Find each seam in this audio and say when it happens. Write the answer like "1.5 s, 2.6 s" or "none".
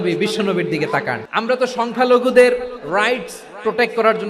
1.2 s